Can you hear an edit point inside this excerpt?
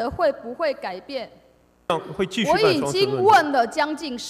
yes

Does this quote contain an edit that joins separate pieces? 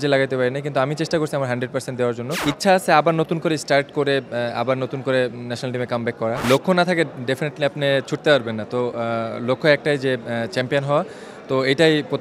yes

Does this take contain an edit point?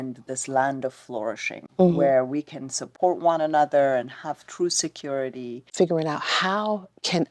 yes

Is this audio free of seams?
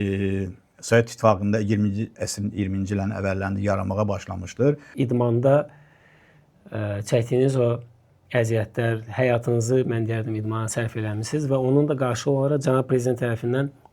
no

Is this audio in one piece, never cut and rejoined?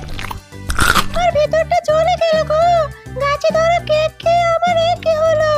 no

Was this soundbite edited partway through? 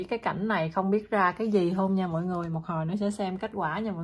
no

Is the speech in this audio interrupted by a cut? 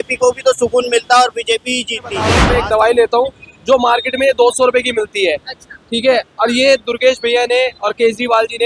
yes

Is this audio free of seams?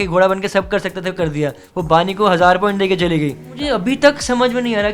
no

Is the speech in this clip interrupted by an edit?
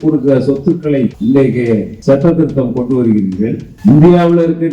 yes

